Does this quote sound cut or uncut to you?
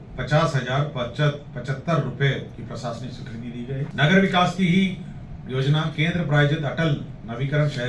cut